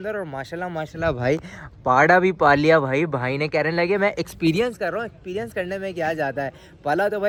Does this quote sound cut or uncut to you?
uncut